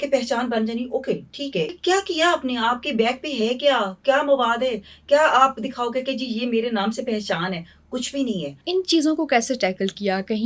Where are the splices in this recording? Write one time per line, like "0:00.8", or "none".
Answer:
0:01.7
0:08.6